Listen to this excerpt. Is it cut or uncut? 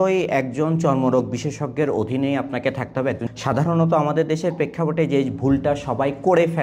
cut